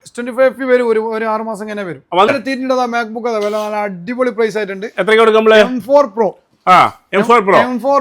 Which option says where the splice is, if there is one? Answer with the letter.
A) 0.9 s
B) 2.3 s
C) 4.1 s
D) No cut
B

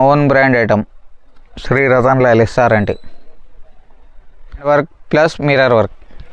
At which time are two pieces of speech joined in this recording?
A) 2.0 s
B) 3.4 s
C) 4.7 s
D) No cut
C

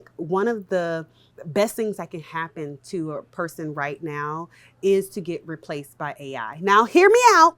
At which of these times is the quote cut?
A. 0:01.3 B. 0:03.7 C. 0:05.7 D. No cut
A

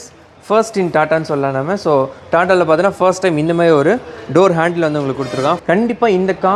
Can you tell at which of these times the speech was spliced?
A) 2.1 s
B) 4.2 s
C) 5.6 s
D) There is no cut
C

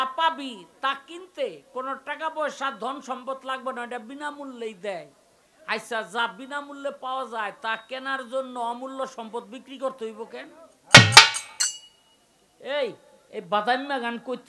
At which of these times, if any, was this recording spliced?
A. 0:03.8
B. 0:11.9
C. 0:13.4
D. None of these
D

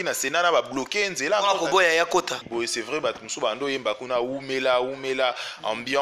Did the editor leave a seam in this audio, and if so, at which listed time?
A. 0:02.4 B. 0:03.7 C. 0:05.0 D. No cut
A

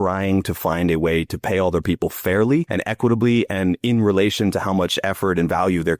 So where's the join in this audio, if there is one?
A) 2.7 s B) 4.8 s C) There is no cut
A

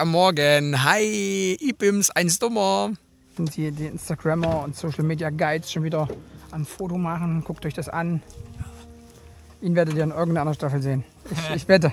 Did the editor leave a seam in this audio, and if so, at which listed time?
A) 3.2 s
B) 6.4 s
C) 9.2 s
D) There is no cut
A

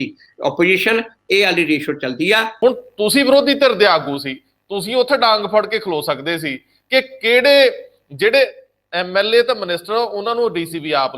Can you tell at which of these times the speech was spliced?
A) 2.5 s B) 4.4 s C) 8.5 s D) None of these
A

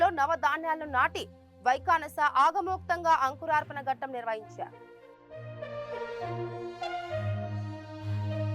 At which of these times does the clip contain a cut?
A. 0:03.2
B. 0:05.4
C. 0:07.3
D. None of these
B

